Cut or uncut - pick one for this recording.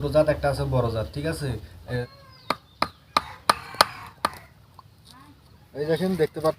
cut